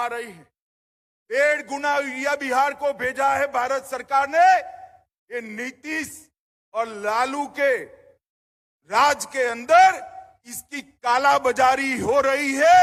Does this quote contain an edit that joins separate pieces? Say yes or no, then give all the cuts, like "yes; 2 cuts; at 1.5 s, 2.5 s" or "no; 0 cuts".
no; 0 cuts